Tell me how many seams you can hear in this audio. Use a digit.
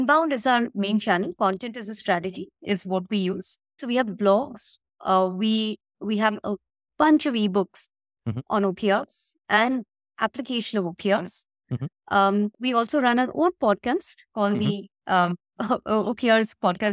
1